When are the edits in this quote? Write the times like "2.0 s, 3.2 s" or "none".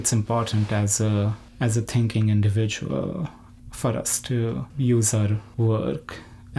none

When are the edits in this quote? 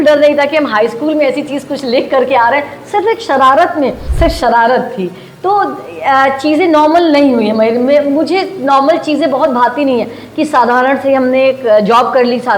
4.0 s

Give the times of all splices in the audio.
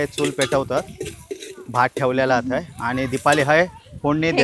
none

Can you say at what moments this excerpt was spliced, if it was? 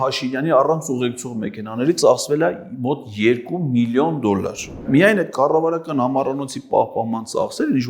4.8 s

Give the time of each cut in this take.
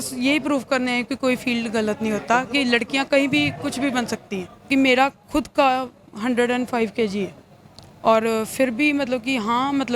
4.7 s

